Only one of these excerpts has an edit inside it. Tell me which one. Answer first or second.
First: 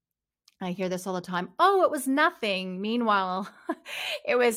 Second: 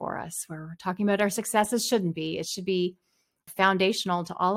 second